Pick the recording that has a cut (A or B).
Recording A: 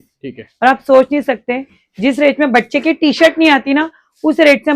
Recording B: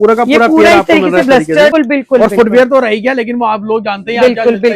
B